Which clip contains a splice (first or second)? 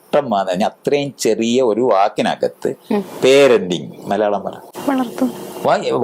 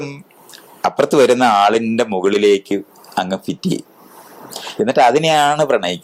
first